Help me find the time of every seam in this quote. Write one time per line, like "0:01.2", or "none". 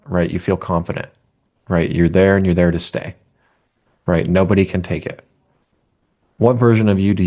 none